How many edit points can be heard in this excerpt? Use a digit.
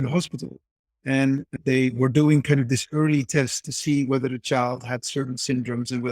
1